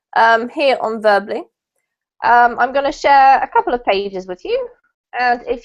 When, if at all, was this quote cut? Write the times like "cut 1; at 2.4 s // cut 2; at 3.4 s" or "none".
cut 1; at 1.8 s